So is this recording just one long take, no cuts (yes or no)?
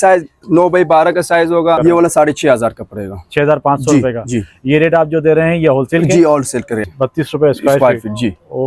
no